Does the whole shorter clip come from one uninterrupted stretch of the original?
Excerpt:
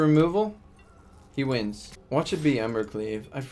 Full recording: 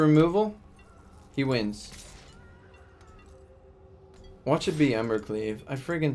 no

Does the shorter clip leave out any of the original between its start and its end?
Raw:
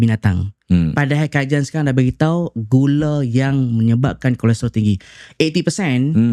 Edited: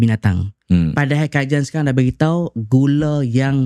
no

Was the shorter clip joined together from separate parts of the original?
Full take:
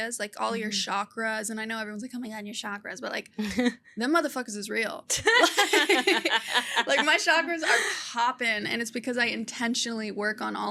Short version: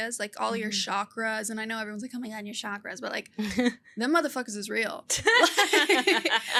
no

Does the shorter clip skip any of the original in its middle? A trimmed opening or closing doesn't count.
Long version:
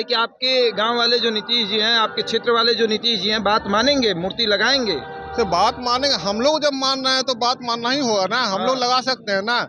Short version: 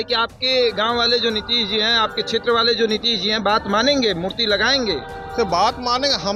no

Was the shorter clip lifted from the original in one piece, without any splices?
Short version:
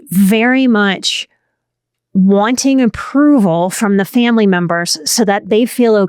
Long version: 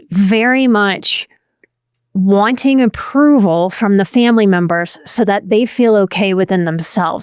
yes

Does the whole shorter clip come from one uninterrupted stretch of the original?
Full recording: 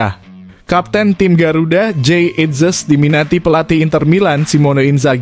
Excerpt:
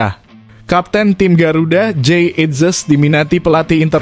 yes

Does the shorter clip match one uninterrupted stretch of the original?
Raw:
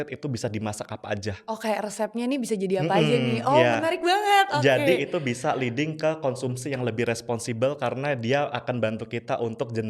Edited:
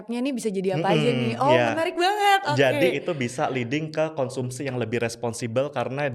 yes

